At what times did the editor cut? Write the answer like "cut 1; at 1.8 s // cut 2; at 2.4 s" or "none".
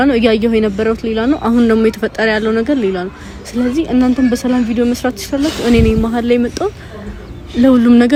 none